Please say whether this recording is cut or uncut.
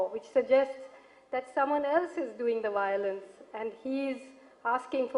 cut